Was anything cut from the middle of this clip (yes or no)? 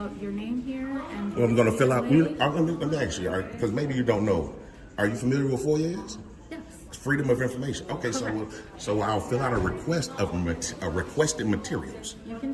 no